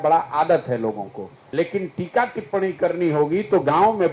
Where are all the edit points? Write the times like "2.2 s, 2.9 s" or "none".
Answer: 1.3 s

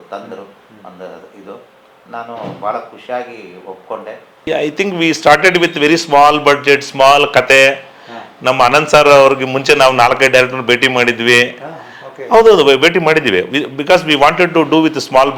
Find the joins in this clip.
4.5 s

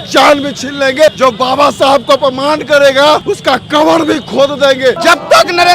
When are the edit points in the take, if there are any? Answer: 1.2 s, 3.3 s, 5.0 s

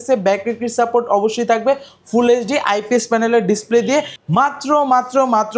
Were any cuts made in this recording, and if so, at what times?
4.1 s

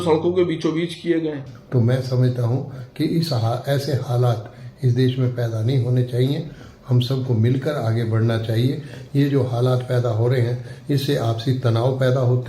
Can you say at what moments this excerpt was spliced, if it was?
1.5 s

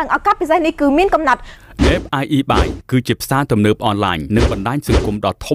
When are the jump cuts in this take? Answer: 1.4 s

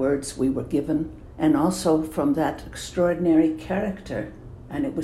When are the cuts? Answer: 1.2 s

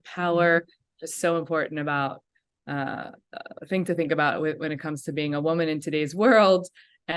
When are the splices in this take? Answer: none

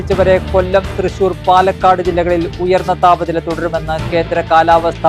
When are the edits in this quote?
none

